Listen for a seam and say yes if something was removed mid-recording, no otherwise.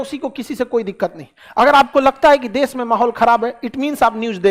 no